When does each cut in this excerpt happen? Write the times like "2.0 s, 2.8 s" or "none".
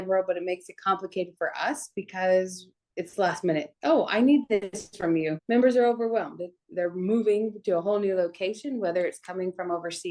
5.4 s